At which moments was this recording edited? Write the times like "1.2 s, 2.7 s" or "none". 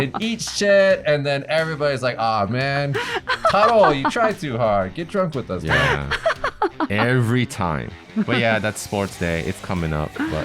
8.1 s